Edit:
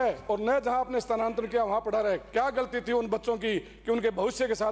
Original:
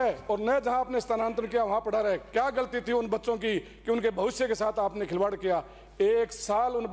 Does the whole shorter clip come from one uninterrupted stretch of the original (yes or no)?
yes